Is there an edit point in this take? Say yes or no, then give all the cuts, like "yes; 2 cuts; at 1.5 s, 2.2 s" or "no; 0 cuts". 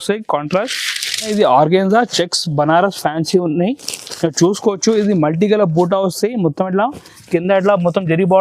yes; 1 cut; at 1.3 s